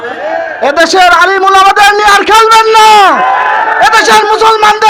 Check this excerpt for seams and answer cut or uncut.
uncut